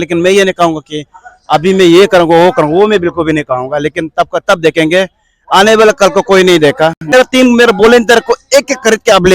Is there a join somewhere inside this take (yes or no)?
yes